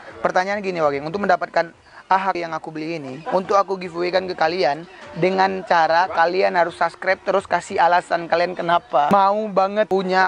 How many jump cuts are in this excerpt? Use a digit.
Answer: 1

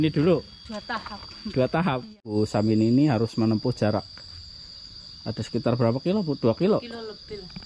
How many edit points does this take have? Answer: 1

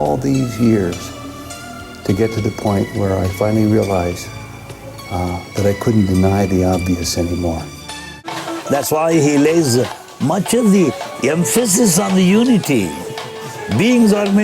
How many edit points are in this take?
1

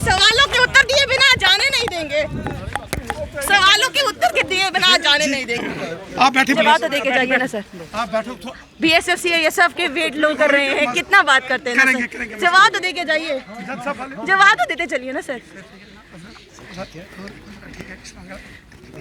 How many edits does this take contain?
1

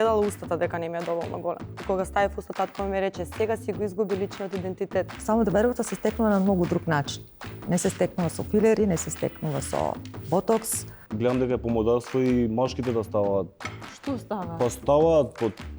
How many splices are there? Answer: 3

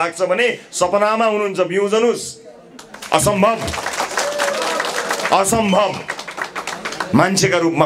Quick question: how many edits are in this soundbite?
0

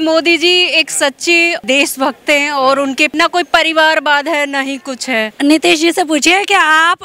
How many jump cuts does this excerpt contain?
3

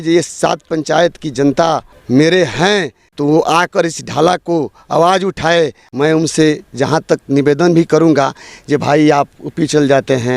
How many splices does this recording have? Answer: 3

